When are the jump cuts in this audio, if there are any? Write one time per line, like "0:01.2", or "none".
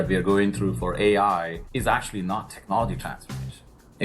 0:01.6